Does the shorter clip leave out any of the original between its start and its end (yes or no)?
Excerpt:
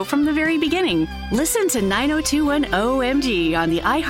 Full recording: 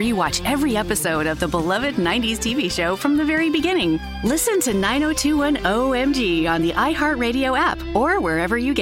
no